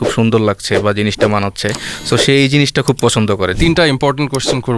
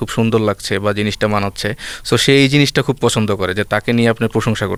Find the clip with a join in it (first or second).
first